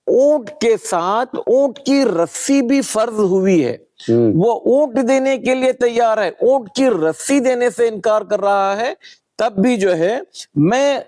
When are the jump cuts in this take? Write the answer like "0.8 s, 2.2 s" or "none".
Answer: none